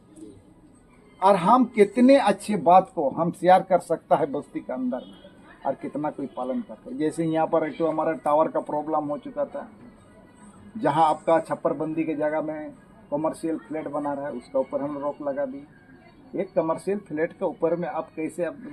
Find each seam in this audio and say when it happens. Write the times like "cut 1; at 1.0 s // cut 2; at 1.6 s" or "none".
none

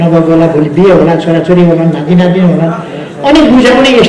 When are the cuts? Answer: none

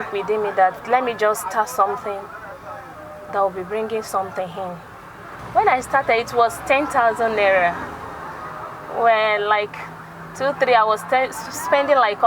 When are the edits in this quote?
cut 1; at 5.4 s

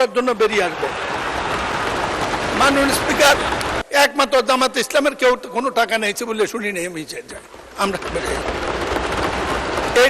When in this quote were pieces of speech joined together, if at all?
cut 1; at 3.8 s

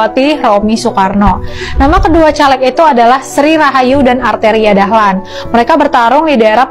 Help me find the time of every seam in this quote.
none

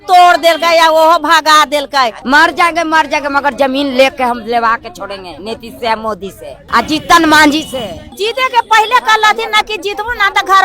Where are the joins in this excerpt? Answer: cut 1; at 2.2 s // cut 2; at 6.5 s // cut 3; at 8.0 s

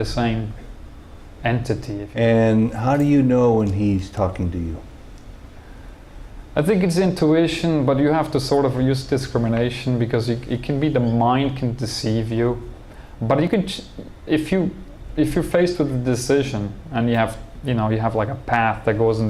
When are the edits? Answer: cut 1; at 2.1 s

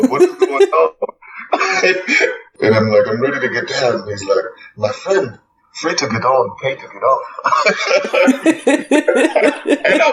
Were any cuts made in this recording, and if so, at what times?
cut 1; at 2.4 s

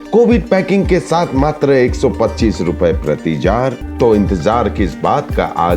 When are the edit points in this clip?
cut 1; at 3.8 s

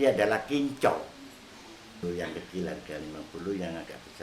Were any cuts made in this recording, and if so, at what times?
cut 1; at 2.0 s

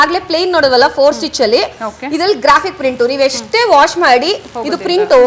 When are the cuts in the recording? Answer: none

